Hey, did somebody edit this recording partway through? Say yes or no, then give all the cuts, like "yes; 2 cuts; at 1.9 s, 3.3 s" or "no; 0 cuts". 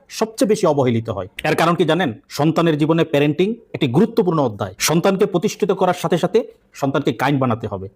no; 0 cuts